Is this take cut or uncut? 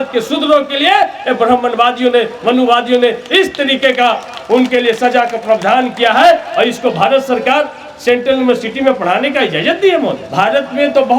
cut